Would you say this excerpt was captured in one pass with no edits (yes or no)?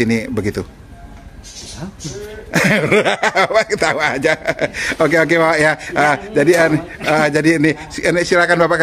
yes